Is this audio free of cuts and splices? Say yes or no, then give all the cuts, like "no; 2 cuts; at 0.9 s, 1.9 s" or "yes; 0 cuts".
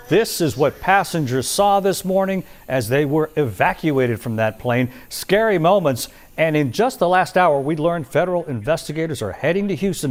yes; 0 cuts